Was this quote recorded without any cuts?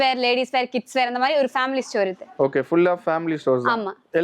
yes; 0 cuts

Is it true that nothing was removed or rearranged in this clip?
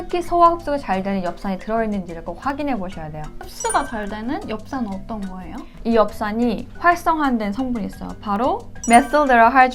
no; 2 cuts; at 3.4 s, 5.7 s

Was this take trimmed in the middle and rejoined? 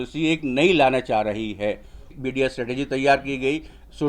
yes; 1 cut; at 2.1 s

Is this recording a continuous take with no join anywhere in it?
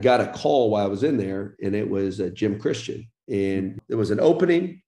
no; 1 cut; at 3.8 s

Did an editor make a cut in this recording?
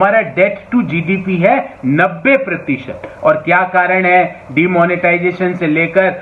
yes; 1 cut; at 3.1 s

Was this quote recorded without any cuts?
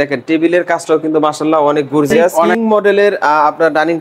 no; 1 cut; at 2.5 s

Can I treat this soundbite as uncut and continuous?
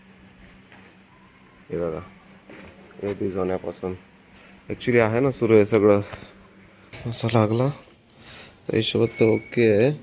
no; 1 cut; at 7.0 s

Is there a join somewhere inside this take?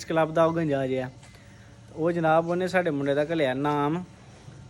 no; 0 cuts

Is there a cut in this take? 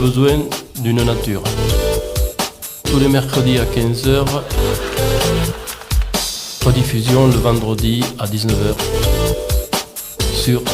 yes; 1 cut; at 8.8 s

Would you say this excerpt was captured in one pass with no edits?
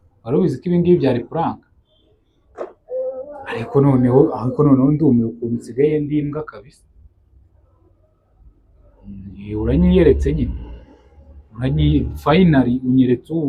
yes; 0 cuts

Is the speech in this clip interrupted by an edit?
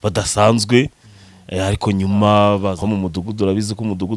yes; 1 cut; at 2.8 s

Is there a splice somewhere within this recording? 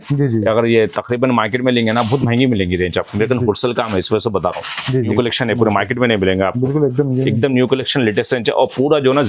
yes; 1 cut; at 5.1 s

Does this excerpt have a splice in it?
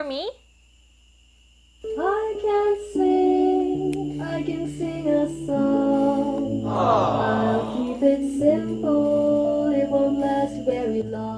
no; 0 cuts

